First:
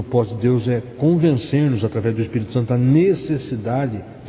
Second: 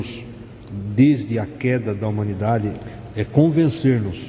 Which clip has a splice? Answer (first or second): second